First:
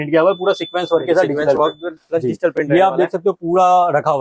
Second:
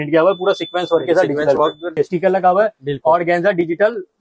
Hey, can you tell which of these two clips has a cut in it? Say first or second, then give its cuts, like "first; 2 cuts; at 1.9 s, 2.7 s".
second; 1 cut; at 2.0 s